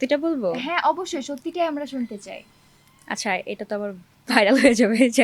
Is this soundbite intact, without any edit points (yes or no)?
yes